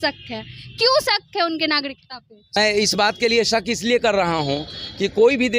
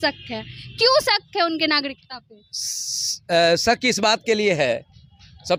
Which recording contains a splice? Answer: first; 1 cut; at 2.6 s

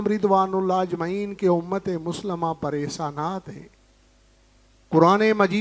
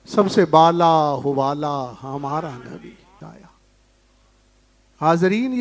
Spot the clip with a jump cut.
second; 1 cut; at 3.2 s

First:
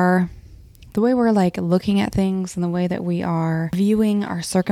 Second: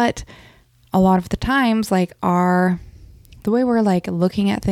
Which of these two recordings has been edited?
first; 1 cut; at 3.7 s

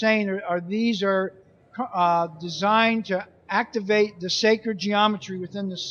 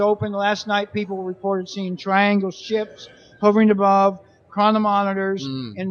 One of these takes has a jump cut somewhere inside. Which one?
first; 1 cut; at 4.8 s

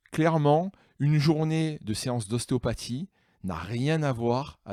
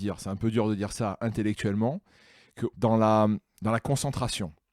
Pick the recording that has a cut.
second; 1 cut; at 2.7 s

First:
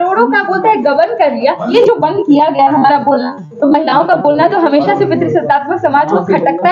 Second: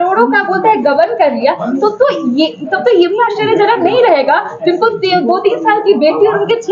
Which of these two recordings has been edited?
first; 1 cut; at 1.7 s

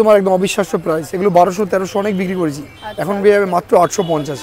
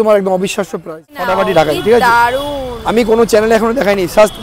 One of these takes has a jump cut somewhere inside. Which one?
second; 1 cut; at 1.2 s

